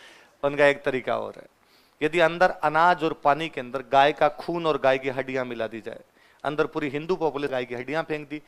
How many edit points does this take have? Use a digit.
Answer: 1